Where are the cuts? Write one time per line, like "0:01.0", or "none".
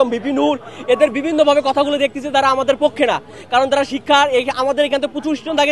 none